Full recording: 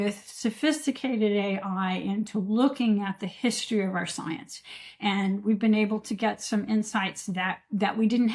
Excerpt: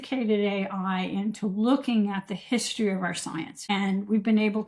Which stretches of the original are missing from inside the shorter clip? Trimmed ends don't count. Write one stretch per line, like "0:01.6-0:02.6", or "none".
0:04.5-0:04.9